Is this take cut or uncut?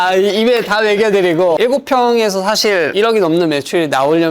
cut